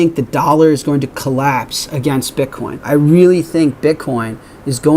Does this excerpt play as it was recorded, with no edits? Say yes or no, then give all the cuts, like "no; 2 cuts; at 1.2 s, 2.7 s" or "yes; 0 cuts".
no; 1 cut; at 2.7 s